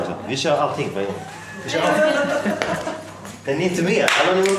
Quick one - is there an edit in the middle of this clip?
no; 0 cuts

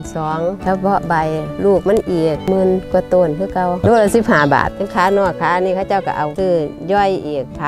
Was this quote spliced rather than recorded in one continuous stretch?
yes; 3 cuts; at 3.8 s, 4.8 s, 6.3 s

